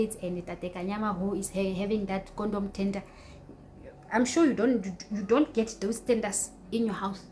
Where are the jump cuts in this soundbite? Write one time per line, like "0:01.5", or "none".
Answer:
none